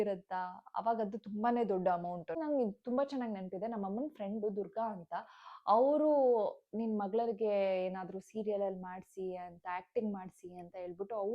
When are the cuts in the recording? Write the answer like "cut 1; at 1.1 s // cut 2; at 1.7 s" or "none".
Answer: cut 1; at 2.4 s